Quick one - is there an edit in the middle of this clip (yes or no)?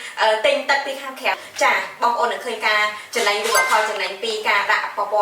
yes